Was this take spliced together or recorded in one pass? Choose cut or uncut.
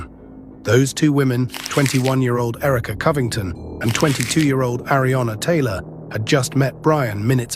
cut